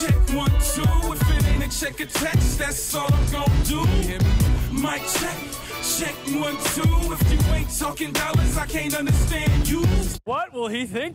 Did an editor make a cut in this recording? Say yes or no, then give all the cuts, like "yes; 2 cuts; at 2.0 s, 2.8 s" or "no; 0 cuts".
no; 0 cuts